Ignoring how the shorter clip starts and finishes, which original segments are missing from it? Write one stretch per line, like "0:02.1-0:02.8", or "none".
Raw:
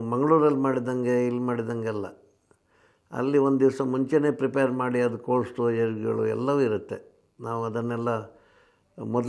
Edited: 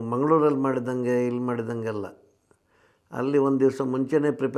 none

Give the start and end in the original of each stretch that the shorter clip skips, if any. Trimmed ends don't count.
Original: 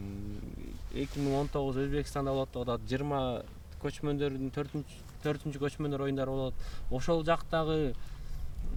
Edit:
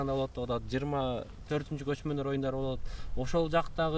0:03.5-0:05.1

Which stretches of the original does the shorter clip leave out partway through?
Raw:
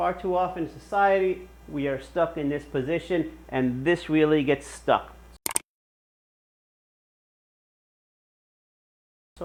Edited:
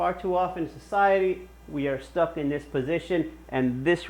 none

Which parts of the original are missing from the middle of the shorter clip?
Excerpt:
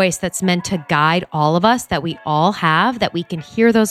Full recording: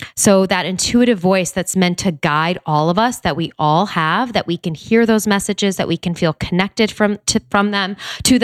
none

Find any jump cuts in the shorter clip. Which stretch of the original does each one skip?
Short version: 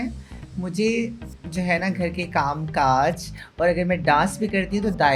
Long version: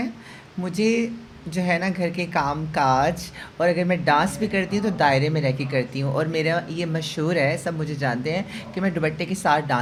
none

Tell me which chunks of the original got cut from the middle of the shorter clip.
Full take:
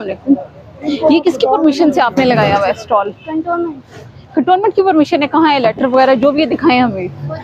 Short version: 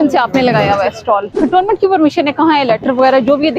0:03.1-0:04.2

